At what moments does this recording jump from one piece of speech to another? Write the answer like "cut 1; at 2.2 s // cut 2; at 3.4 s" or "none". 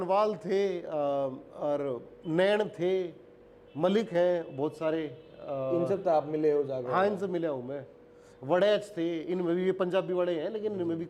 none